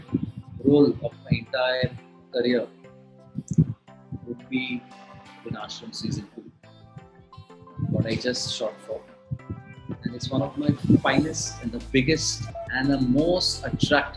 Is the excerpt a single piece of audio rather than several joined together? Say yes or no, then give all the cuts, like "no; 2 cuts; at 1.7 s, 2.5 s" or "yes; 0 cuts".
yes; 0 cuts